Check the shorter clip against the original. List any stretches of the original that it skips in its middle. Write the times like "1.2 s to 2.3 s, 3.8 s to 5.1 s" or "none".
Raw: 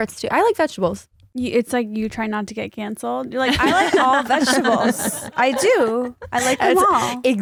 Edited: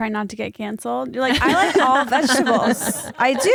none